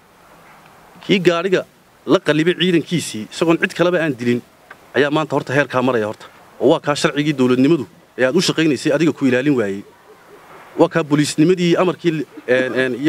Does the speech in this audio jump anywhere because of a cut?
no; 0 cuts

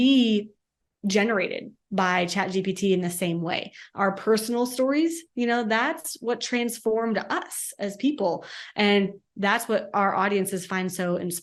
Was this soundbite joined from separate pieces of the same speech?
no; 0 cuts

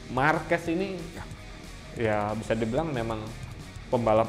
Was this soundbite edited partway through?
no; 0 cuts

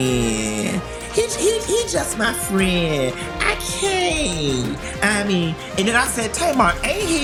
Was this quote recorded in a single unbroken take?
yes; 0 cuts

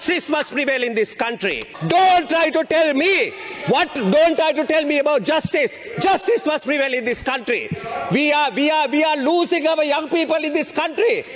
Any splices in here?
yes; 1 cut; at 1.7 s

